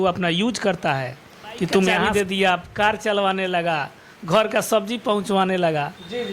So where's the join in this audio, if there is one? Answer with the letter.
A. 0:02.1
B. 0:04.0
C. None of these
A